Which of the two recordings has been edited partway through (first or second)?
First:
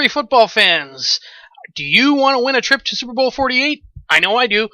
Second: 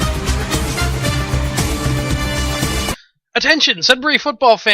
second